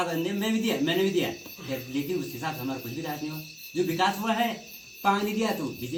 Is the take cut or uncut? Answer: uncut